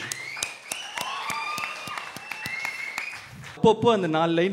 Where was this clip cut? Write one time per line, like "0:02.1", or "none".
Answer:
0:03.6